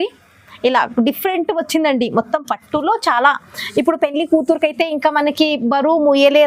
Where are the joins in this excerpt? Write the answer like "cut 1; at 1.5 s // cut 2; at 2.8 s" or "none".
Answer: none